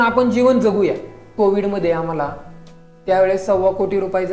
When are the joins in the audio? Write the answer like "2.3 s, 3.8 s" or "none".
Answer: 1.3 s